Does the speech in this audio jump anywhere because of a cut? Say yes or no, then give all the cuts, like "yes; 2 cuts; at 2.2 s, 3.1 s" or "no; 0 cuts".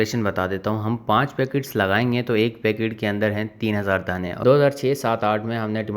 yes; 1 cut; at 4.4 s